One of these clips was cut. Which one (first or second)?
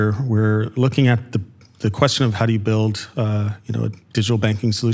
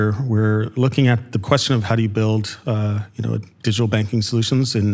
second